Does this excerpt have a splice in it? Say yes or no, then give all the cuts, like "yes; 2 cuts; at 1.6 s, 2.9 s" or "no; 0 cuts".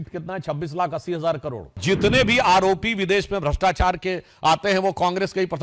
yes; 1 cut; at 1.8 s